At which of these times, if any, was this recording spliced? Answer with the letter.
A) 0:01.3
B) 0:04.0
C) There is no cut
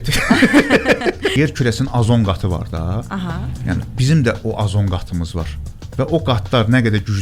A